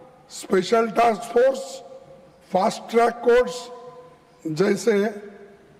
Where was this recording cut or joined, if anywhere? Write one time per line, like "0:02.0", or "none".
none